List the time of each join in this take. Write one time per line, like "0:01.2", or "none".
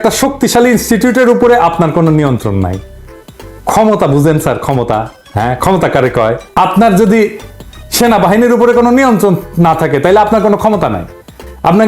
0:06.4